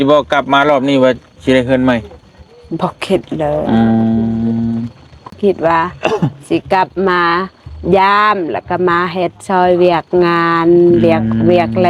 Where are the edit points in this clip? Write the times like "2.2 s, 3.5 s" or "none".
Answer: 5.3 s